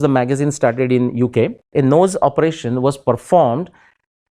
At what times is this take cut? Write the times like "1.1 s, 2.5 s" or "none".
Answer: 1.7 s